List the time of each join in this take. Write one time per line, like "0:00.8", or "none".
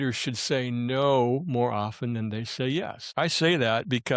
0:03.0